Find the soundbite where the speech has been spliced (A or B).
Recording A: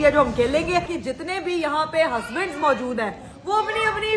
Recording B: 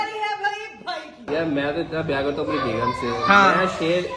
A